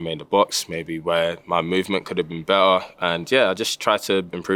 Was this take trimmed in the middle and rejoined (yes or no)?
no